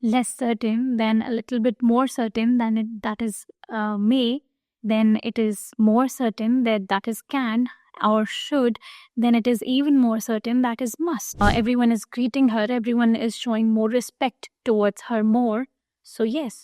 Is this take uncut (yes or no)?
no